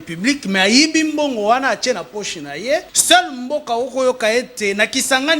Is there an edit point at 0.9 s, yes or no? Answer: no